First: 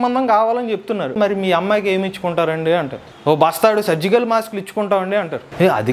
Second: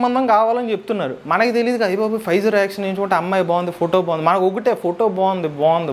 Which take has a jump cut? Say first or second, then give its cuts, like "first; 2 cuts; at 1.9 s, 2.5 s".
first; 2 cuts; at 1.2 s, 3.0 s